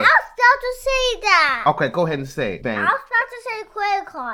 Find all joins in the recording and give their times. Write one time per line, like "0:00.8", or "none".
0:02.6